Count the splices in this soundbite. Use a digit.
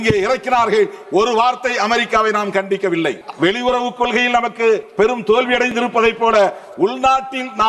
2